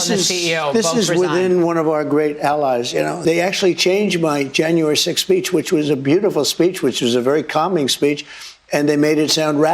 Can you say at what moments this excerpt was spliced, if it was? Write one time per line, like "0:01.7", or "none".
0:03.2

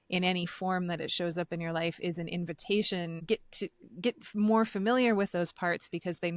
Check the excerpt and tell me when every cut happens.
0:03.2

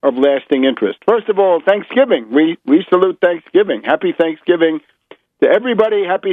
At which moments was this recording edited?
none

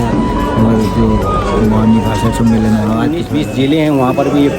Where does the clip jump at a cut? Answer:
0:03.2

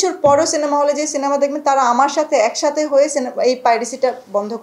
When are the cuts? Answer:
none

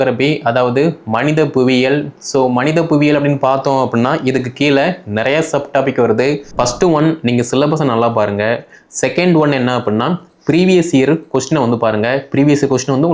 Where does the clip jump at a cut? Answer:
0:06.5

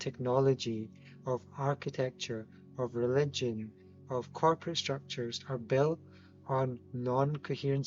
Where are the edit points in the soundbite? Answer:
none

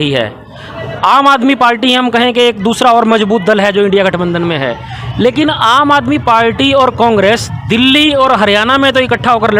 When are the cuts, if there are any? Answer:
none

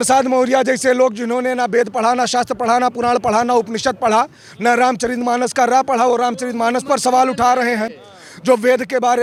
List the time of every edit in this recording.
none

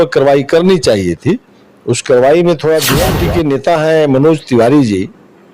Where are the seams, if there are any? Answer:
0:03.1

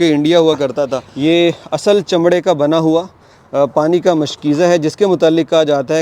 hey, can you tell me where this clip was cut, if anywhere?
0:01.0

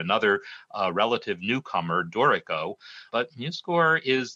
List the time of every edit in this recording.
0:03.1

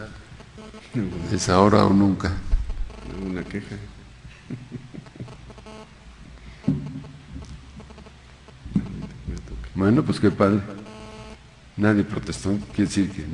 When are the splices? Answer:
0:03.6

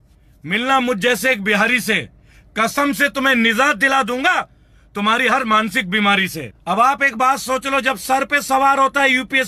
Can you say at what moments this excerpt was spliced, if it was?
0:06.5

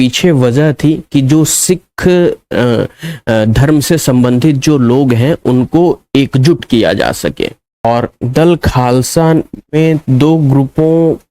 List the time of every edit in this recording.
0:07.8

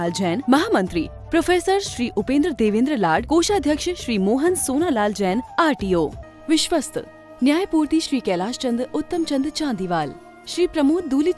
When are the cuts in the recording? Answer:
0:06.2

